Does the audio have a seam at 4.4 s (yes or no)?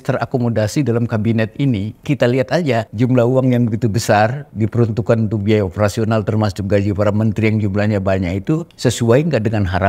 yes